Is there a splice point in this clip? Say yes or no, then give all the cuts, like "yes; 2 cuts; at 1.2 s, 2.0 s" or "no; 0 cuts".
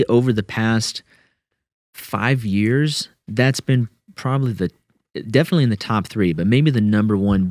no; 0 cuts